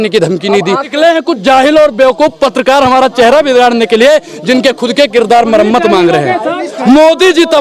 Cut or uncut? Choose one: cut